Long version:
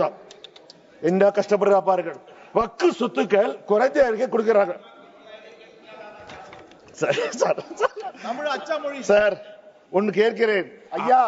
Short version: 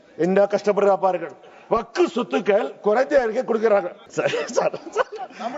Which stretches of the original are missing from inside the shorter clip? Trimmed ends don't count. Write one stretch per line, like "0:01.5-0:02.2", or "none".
0:04.8-0:06.8